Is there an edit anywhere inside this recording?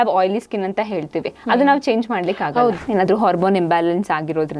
yes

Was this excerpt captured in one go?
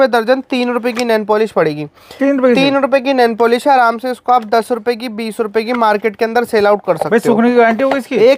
yes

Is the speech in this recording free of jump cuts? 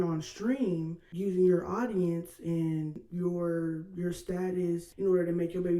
no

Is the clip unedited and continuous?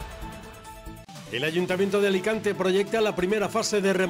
no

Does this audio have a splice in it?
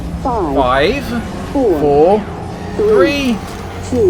no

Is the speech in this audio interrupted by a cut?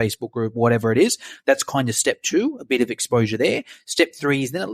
no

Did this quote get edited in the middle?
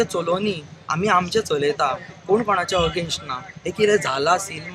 no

